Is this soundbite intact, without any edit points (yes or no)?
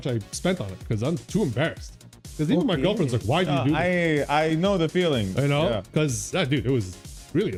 yes